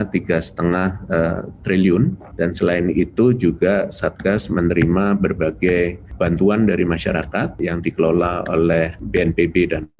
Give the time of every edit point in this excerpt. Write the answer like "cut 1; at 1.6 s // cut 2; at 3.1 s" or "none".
cut 1; at 2.2 s // cut 2; at 6.0 s // cut 3; at 7.6 s // cut 4; at 9.0 s